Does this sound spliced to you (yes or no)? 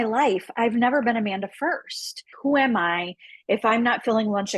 yes